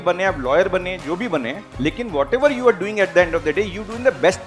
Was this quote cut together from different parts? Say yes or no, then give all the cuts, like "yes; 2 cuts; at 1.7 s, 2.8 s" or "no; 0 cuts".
no; 0 cuts